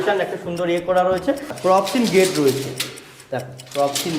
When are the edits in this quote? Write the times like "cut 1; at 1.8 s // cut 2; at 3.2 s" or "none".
cut 1; at 1.5 s